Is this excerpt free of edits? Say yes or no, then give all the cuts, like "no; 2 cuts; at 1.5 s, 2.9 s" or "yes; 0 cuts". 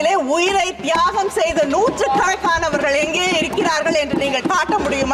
yes; 0 cuts